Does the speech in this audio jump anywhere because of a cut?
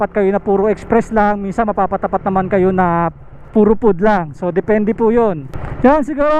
no; 0 cuts

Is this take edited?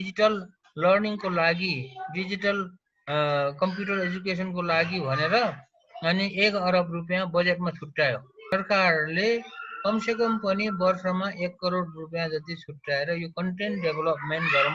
yes; 1 cut; at 8.5 s

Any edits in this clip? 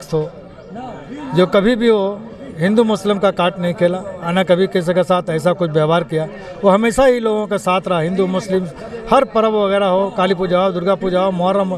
no; 0 cuts

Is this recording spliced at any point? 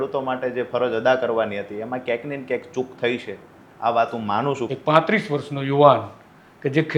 yes; 1 cut; at 4.7 s

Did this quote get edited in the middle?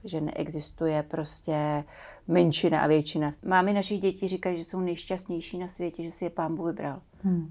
yes; 2 cuts; at 3.3 s, 5.0 s

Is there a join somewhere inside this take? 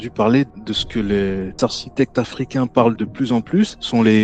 yes; 1 cut; at 3.2 s

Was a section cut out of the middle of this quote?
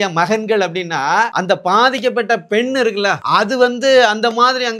yes; 2 cuts; at 1.3 s, 3.2 s

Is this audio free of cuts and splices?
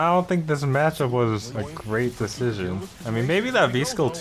no; 2 cuts; at 1.5 s, 2.9 s

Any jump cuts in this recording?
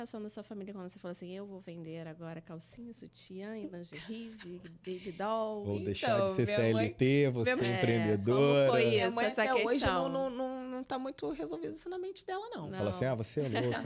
no; 0 cuts

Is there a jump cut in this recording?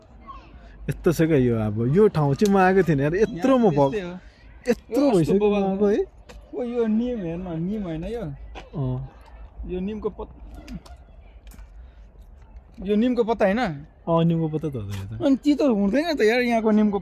no; 0 cuts

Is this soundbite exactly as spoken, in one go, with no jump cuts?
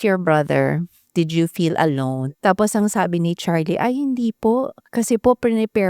no; 3 cuts; at 1.0 s, 2.3 s, 4.8 s

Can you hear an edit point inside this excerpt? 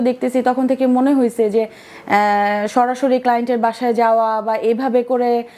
no; 0 cuts

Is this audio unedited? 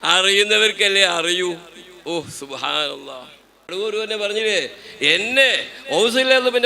no; 1 cut; at 3.7 s

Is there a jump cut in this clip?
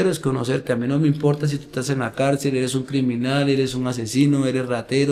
no; 0 cuts

